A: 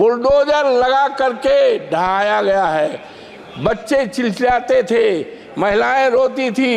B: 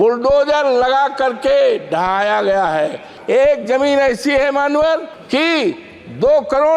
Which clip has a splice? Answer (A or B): B